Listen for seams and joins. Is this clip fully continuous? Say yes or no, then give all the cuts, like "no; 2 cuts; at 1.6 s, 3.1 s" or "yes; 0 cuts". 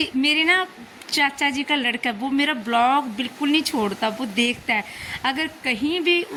yes; 0 cuts